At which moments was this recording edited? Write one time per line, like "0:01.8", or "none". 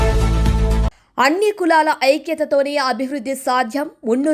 none